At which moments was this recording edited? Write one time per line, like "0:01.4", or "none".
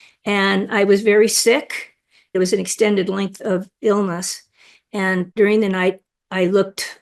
0:02.3
0:05.3